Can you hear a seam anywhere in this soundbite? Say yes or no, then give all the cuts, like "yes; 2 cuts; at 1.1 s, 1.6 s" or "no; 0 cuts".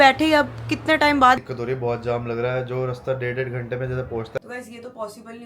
yes; 2 cuts; at 1.4 s, 4.4 s